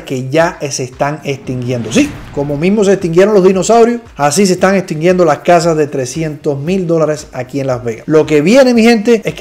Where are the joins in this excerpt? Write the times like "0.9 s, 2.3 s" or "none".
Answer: none